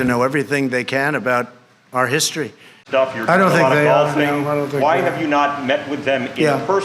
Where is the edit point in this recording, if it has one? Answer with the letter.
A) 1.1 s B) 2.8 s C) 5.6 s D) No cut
B